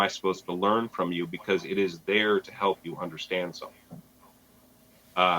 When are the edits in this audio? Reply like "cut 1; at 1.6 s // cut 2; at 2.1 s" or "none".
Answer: none